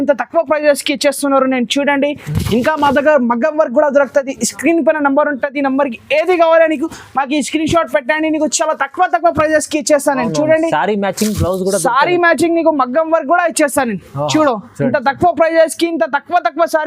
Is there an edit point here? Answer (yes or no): no